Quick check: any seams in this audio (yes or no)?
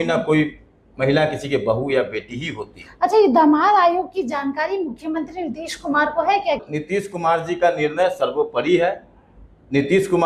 yes